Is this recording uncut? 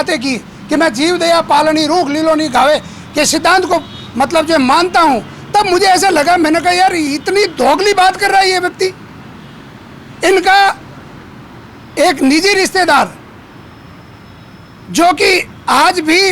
yes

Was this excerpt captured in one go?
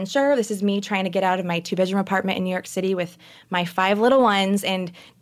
yes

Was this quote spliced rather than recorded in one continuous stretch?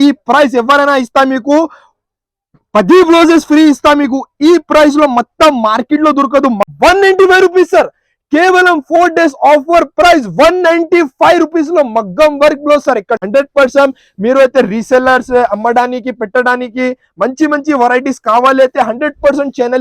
yes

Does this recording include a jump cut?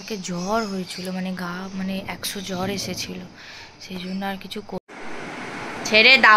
yes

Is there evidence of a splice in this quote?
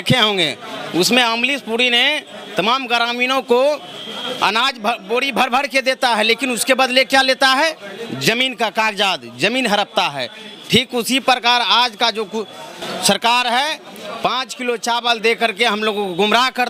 no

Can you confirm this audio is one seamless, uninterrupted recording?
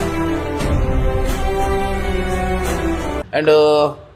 yes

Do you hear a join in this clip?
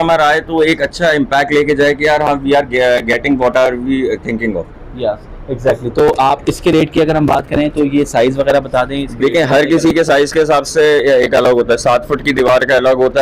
no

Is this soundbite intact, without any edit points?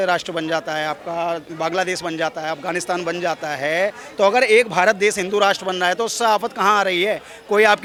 yes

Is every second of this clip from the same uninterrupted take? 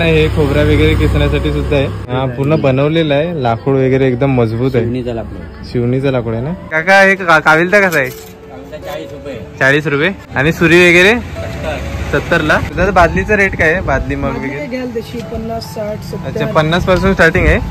no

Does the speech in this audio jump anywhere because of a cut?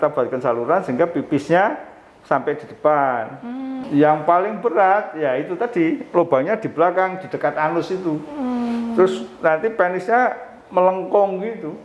yes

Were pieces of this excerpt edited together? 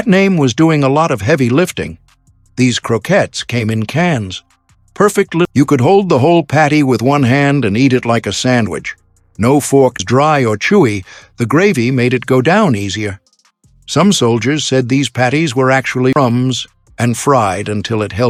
no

